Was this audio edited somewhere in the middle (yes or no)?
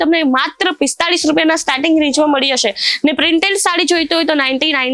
no